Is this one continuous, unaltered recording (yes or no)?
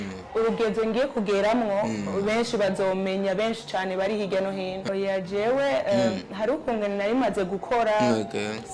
no